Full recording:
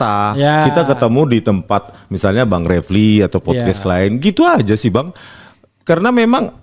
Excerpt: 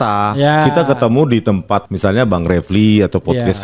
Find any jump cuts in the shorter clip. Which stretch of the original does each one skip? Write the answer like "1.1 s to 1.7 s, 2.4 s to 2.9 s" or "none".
1.9 s to 2.1 s